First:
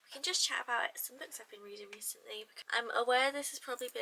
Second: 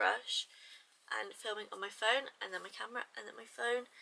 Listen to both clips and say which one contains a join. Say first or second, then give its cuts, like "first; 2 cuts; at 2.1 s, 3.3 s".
first; 1 cut; at 2.5 s